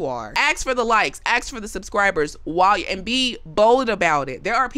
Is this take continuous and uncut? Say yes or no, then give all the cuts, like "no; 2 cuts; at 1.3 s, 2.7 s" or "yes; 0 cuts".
yes; 0 cuts